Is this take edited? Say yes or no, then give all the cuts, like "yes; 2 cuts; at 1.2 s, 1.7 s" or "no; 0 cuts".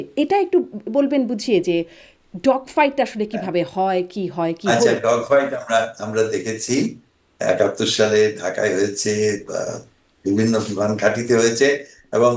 no; 0 cuts